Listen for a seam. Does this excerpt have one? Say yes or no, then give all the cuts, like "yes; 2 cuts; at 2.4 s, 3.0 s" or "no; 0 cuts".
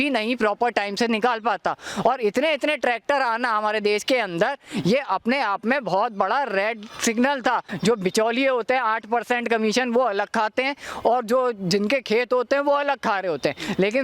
yes; 1 cut; at 7.7 s